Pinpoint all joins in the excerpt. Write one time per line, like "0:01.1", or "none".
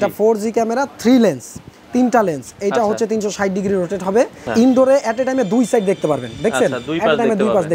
0:04.4